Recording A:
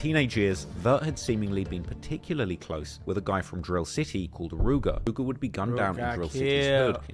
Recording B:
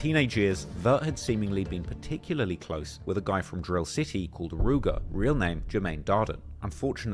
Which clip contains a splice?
A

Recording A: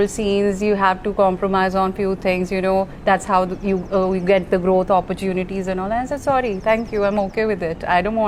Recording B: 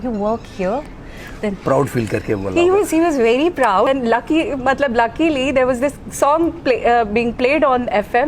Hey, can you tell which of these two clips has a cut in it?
B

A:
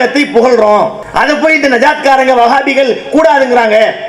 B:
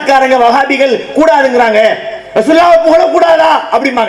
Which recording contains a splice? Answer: A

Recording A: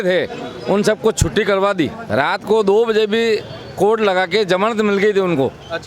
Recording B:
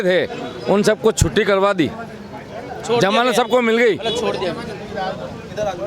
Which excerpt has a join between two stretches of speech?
A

